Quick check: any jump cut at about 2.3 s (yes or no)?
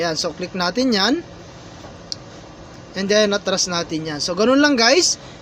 yes